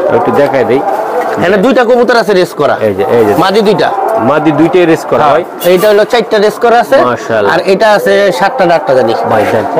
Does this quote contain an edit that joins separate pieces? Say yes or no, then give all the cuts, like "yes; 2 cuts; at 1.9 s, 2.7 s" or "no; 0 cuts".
no; 0 cuts